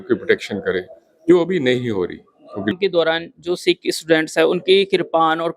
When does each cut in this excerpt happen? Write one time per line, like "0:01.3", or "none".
0:02.7